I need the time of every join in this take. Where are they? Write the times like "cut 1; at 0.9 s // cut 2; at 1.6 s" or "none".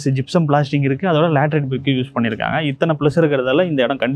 none